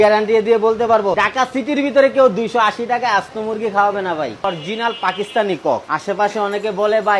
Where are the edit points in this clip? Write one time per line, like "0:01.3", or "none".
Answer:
0:01.2
0:04.4

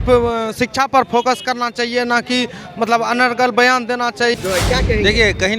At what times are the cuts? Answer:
0:04.3

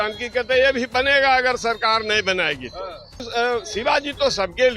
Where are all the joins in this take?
0:03.2

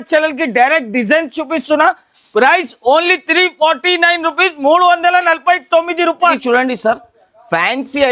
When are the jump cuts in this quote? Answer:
none

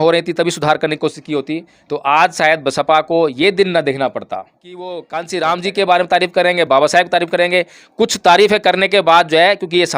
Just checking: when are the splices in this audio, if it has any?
0:04.9

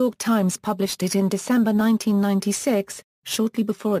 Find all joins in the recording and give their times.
0:00.9

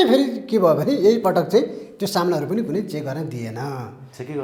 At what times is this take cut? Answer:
none

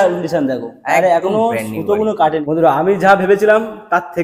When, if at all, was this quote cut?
0:02.4

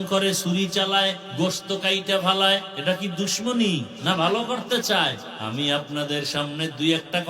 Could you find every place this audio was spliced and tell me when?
0:01.2
0:02.7
0:03.9
0:05.3

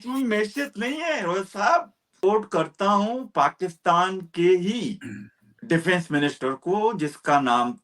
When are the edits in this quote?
0:02.2

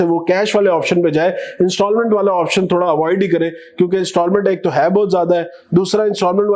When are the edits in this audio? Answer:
none

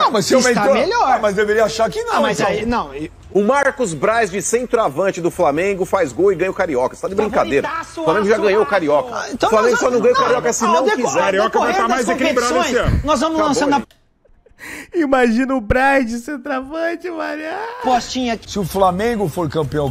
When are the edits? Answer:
0:03.2
0:18.4

